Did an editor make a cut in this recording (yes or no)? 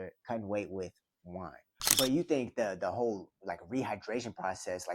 yes